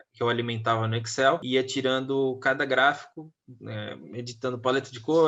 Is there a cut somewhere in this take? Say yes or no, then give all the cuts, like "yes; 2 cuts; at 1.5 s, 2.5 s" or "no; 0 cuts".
yes; 1 cut; at 1.4 s